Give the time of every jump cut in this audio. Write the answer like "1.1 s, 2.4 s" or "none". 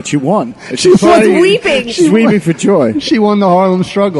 none